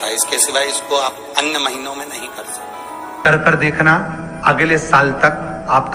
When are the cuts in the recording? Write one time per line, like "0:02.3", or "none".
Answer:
0:03.1